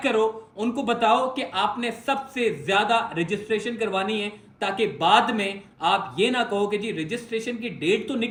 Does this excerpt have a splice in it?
no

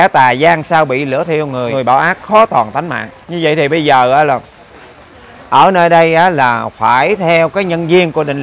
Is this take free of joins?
no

